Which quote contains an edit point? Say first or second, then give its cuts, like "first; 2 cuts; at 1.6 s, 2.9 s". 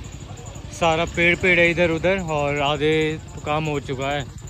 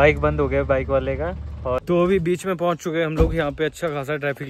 second; 1 cut; at 1.8 s